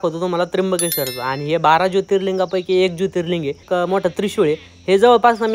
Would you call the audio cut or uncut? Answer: cut